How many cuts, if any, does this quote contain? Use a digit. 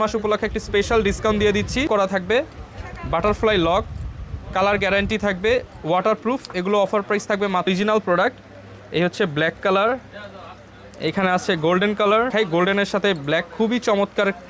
3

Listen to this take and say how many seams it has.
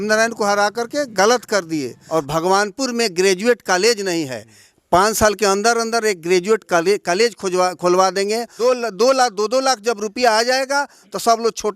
2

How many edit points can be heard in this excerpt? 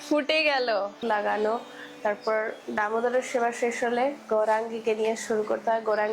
1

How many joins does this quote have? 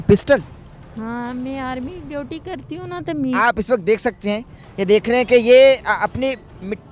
1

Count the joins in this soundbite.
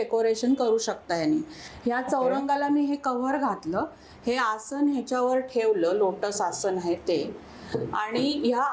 0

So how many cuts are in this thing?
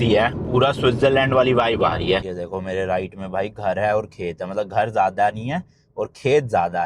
1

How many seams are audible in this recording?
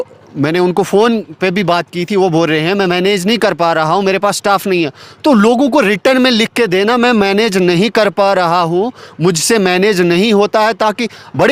0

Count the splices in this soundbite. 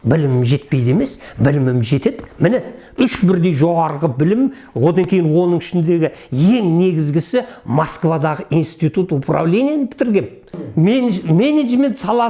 1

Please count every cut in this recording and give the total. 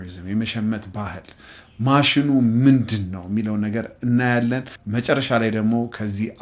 1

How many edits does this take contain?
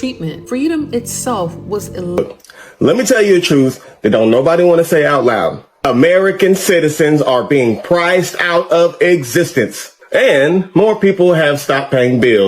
1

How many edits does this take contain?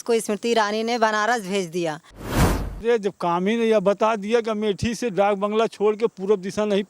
1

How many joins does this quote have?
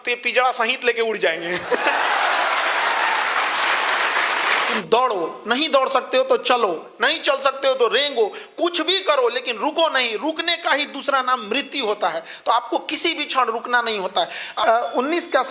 2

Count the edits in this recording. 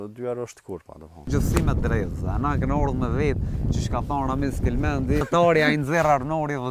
2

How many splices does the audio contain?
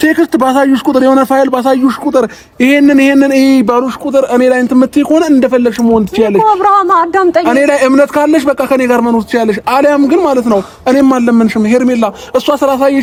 0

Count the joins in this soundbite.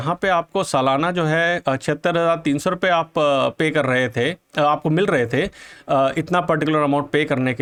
0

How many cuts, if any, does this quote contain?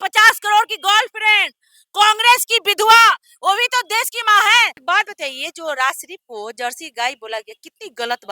1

